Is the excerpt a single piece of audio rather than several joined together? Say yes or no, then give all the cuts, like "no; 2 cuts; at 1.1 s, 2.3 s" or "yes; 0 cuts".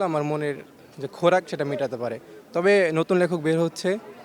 yes; 0 cuts